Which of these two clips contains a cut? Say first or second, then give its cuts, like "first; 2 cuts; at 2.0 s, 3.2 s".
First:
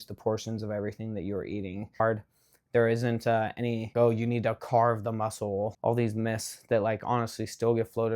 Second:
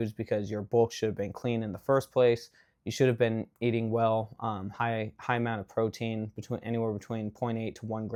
first; 3 cuts; at 2.0 s, 3.9 s, 5.7 s